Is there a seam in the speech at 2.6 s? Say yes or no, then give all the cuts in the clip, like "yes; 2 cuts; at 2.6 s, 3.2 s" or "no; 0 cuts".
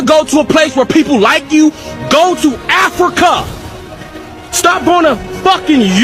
no; 0 cuts